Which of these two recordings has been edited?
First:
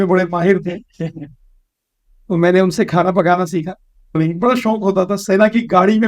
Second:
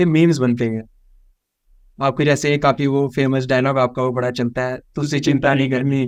first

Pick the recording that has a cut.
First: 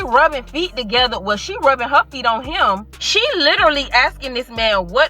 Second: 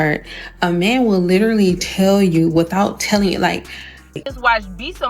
second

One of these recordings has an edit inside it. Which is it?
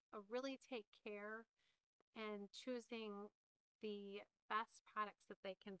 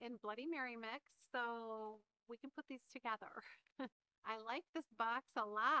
second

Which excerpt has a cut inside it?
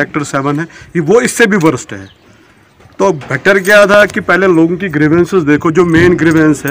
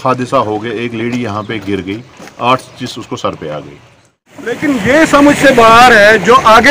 second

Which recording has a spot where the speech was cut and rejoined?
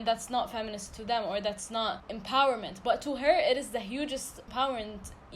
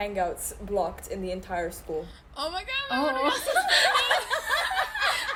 first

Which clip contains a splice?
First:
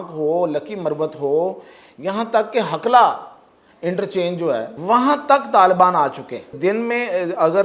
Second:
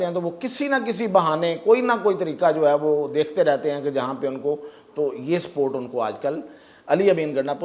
first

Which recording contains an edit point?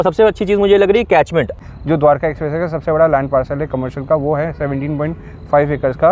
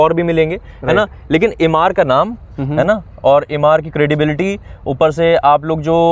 first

